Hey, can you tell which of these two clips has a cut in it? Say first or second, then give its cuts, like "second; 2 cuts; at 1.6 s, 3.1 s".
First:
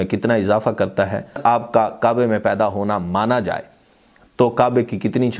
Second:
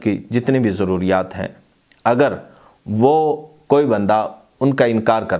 first; 1 cut; at 1.4 s